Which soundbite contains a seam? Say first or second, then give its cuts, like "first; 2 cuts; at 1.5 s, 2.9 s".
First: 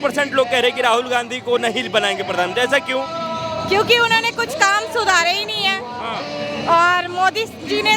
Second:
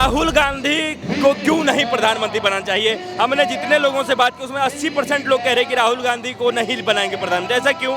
second; 1 cut; at 1.0 s